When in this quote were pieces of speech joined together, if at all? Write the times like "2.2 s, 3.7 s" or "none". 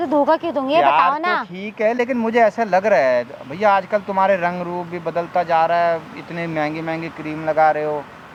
none